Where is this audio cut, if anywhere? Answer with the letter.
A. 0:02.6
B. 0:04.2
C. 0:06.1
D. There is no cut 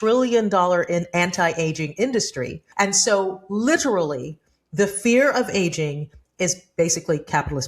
A